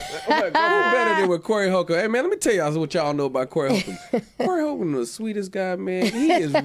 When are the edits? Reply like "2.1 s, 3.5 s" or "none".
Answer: none

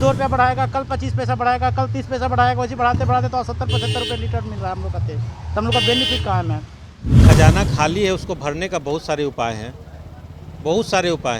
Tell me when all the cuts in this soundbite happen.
7.2 s

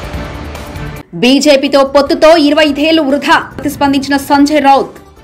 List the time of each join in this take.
1.0 s

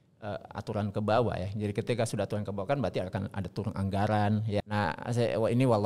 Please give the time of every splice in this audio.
4.7 s

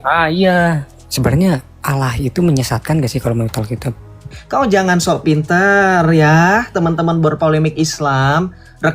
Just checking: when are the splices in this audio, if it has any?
1.0 s, 4.4 s

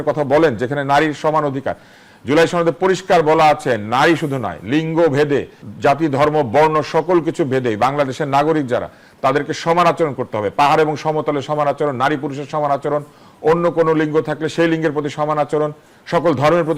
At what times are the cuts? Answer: 5.6 s

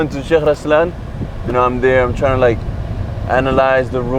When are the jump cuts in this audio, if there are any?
none

